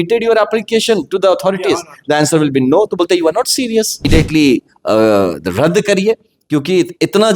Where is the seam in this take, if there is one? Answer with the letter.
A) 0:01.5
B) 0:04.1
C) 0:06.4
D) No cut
B